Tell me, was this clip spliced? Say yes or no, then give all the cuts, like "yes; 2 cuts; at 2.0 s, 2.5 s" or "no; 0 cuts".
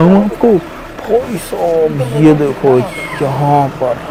no; 0 cuts